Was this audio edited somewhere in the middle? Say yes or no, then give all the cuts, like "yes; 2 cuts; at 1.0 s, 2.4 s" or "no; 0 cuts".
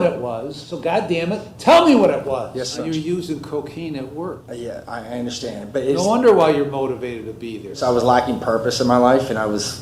yes; 4 cuts; at 0.9 s, 2.8 s, 4.5 s, 7.6 s